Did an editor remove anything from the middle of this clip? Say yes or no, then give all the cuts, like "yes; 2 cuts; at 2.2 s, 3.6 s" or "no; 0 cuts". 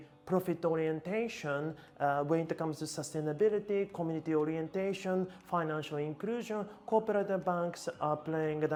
no; 0 cuts